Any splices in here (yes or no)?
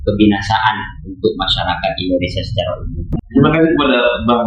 yes